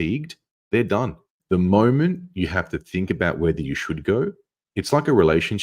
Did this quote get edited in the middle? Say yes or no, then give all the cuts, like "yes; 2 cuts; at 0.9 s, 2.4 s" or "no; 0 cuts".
yes; 1 cut; at 1.3 s